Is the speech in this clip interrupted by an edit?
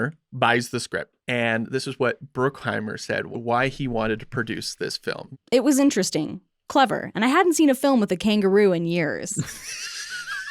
yes; 2 cuts; at 1.1 s, 3.3 s

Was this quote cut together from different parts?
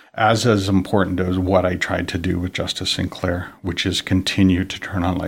no; 0 cuts

